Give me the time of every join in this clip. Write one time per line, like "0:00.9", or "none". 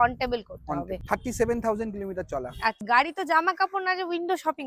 0:01.0
0:02.8